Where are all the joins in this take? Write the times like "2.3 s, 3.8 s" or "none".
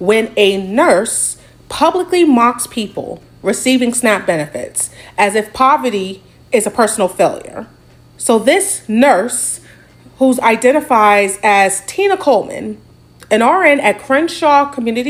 none